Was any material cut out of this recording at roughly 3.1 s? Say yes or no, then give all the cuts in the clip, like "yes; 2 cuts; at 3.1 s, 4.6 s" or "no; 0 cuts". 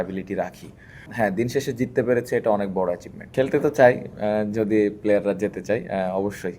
yes; 2 cuts; at 1.0 s, 3.1 s